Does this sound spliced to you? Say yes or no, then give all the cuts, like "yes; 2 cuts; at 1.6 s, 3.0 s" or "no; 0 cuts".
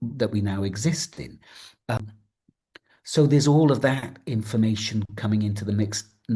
yes; 1 cut; at 2.0 s